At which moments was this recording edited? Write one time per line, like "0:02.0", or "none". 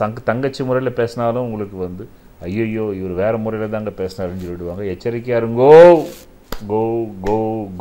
none